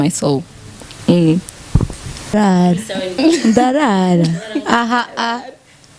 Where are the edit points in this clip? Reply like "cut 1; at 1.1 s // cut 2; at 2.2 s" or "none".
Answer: cut 1; at 2.3 s